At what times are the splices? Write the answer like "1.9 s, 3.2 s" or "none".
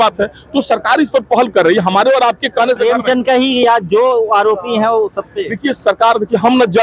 none